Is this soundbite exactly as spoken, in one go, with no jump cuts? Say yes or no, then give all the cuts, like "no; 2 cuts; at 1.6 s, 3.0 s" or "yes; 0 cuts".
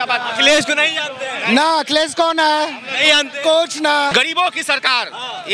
no; 1 cut; at 4.1 s